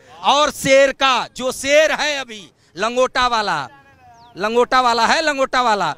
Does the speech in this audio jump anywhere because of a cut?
no; 0 cuts

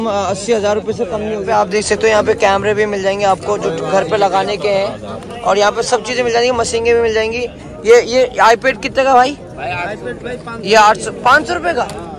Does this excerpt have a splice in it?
no; 0 cuts

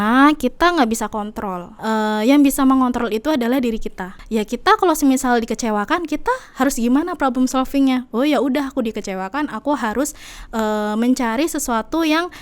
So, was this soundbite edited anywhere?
yes; 2 cuts; at 1.8 s, 4.1 s

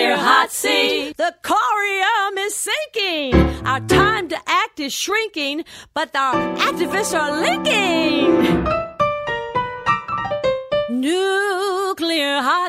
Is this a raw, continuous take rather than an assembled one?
yes; 0 cuts

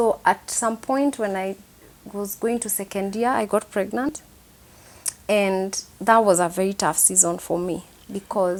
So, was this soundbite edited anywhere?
no; 0 cuts

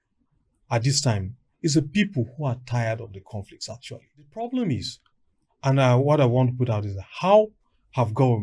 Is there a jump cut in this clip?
yes; 1 cut; at 4.3 s

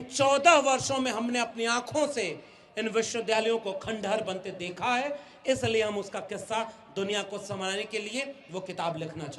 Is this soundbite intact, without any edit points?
yes; 0 cuts

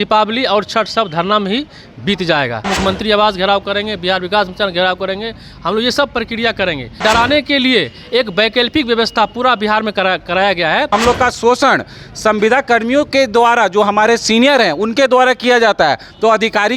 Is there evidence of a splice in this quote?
yes; 3 cuts; at 2.7 s, 7.0 s, 10.9 s

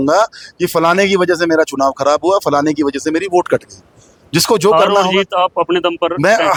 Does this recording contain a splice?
no; 0 cuts

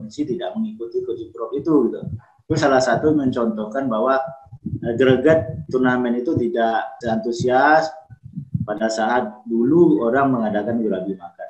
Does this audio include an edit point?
yes; 1 cut; at 6.9 s

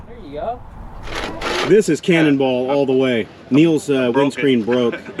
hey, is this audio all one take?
no; 1 cut; at 1.3 s

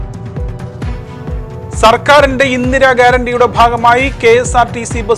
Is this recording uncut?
no; 2 cuts; at 0.9 s, 1.8 s

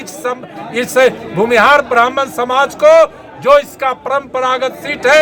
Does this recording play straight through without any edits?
yes; 0 cuts

